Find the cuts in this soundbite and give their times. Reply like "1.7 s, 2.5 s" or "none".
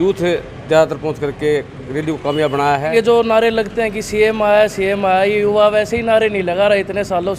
2.9 s

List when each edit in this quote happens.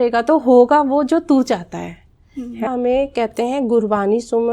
2.7 s

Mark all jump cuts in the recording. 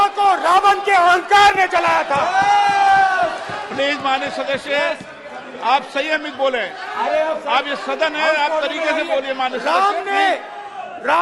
none

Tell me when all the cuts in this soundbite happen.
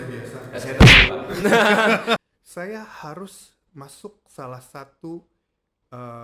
2.2 s

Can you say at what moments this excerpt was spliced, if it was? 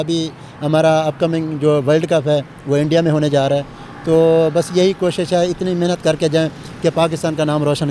none

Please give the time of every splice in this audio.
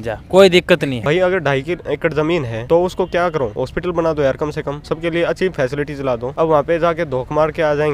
0.9 s, 2.5 s, 3.6 s, 4.8 s, 6.3 s

